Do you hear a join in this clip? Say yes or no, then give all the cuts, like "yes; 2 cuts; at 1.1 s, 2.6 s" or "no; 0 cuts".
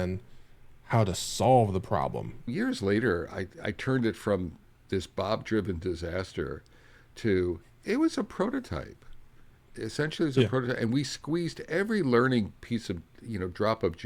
yes; 1 cut; at 2.5 s